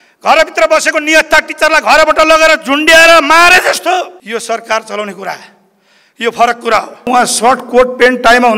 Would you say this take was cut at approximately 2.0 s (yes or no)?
no